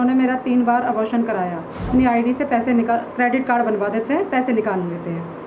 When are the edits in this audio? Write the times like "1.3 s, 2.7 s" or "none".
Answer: 1.9 s